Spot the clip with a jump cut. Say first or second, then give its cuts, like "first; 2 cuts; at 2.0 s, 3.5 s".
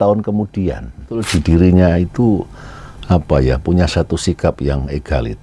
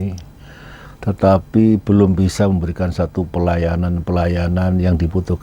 first; 1 cut; at 1.3 s